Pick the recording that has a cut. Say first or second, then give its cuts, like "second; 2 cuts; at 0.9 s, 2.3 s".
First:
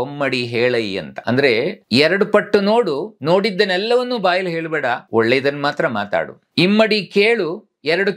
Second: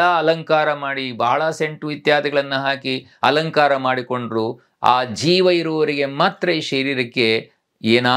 first; 4 cuts; at 1.5 s, 3.1 s, 5.0 s, 6.4 s